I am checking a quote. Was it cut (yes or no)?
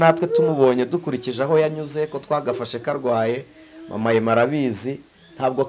no